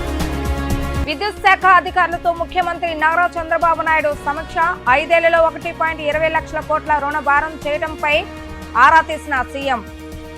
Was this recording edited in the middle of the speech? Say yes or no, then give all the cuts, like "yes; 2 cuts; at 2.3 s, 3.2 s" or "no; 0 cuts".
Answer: yes; 1 cut; at 1.0 s